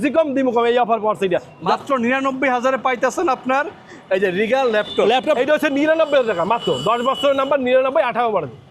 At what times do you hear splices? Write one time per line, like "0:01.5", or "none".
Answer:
0:01.5
0:05.4